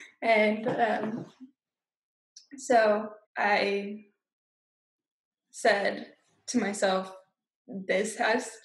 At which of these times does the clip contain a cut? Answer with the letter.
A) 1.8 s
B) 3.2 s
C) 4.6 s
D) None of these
B